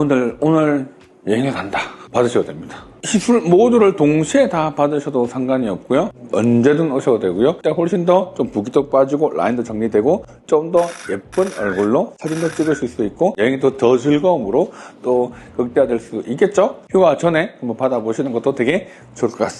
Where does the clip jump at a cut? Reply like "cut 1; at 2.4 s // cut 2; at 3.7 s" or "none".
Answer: cut 1; at 6.1 s // cut 2; at 7.6 s // cut 3; at 13.4 s